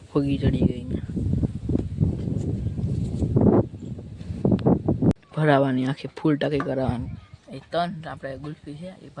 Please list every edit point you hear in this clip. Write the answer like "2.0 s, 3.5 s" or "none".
5.3 s